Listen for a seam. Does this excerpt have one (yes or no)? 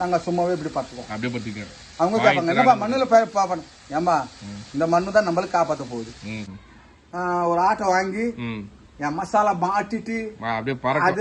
yes